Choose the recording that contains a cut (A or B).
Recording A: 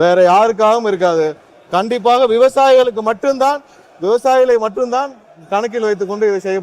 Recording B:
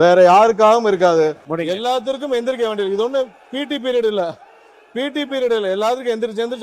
B